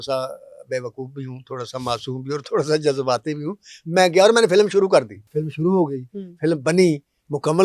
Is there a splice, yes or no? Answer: yes